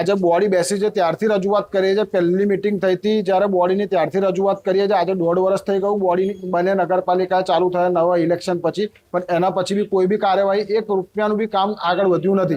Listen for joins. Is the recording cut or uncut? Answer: uncut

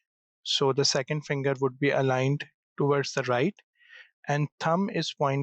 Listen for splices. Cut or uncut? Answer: uncut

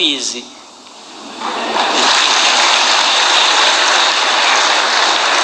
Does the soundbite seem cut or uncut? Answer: uncut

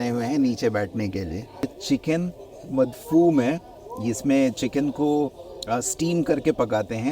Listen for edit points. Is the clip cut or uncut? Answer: cut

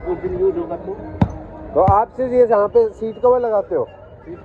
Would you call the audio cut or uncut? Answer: uncut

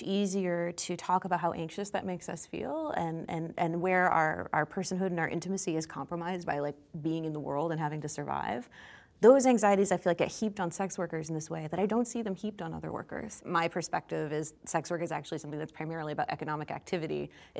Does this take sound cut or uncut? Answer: cut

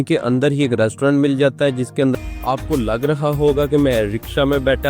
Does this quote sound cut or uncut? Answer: cut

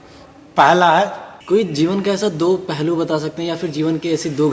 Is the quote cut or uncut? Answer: cut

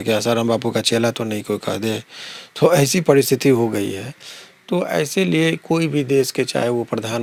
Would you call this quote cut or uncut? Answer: uncut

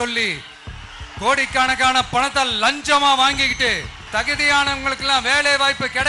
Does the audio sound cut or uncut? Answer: cut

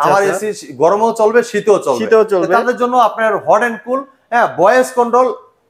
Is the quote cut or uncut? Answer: uncut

